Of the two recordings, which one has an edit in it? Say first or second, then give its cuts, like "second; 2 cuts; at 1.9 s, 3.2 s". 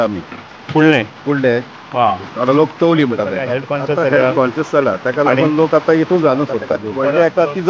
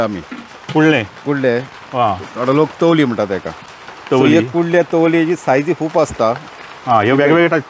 first; 2 cuts; at 3.7 s, 6.9 s